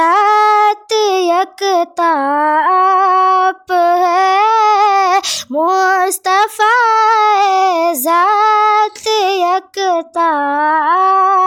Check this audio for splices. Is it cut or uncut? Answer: uncut